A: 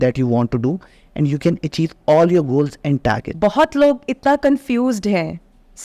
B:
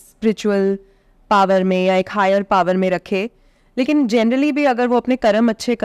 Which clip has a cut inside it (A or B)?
A